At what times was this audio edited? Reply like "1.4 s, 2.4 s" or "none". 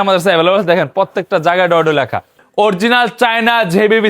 2.3 s

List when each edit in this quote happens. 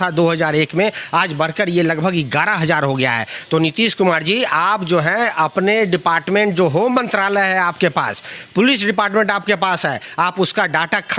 none

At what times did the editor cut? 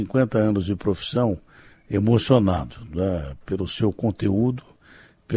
none

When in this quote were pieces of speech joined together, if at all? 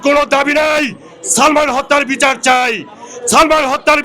none

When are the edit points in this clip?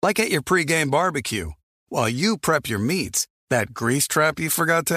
none

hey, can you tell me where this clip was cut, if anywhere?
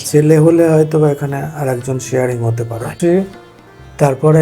2.9 s

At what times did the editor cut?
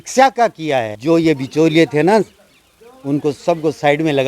0.9 s

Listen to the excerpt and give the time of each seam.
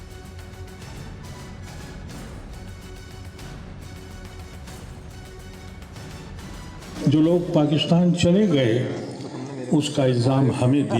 2.1 s

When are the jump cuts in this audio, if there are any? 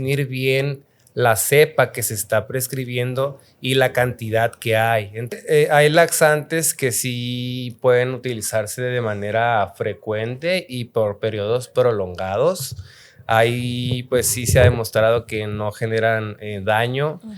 5.4 s

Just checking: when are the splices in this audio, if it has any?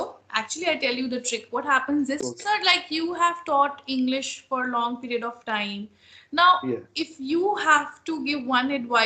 2.3 s

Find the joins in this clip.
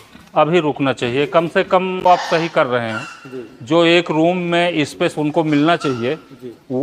2.0 s

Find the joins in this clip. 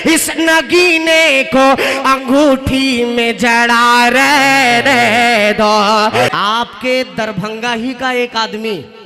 6.3 s

